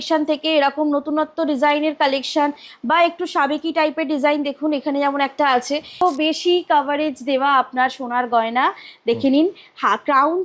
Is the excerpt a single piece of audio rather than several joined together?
no; 1 cut; at 6.0 s

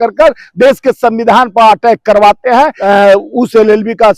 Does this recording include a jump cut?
yes; 1 cut; at 2.8 s

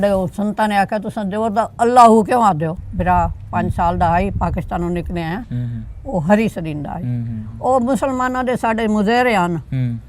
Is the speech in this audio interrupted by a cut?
yes; 1 cut; at 2.8 s

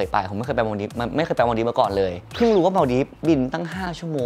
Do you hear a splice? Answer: no; 0 cuts

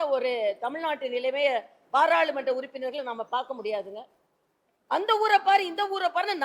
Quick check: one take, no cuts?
yes; 0 cuts

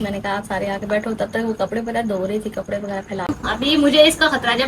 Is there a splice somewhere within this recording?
yes; 1 cut; at 3.3 s

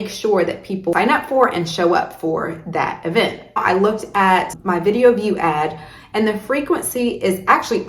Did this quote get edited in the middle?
yes; 3 cuts; at 0.9 s, 3.6 s, 4.6 s

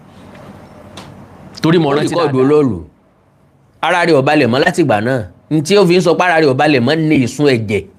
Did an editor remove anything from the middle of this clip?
yes; 1 cut; at 2.1 s

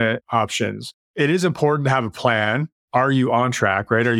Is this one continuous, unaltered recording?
no; 2 cuts; at 1.1 s, 2.7 s

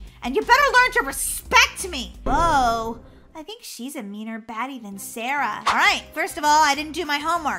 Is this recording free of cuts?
no; 2 cuts; at 2.3 s, 5.6 s

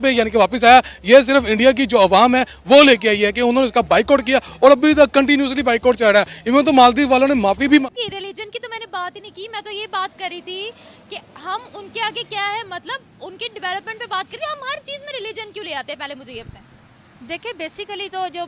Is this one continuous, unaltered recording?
no; 1 cut; at 8.0 s

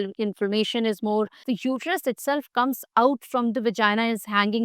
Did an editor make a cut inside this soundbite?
yes; 1 cut; at 1.4 s

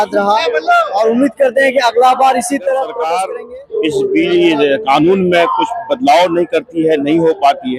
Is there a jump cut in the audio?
yes; 1 cut; at 3.2 s

